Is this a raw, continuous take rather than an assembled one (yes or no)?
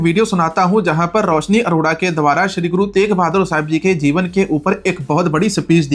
yes